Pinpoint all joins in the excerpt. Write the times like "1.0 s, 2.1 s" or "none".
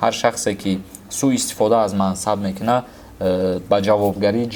none